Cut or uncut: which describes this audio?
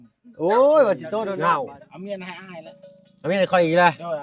cut